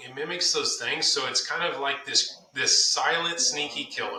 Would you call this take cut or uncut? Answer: uncut